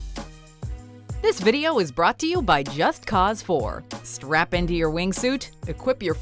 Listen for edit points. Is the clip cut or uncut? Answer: cut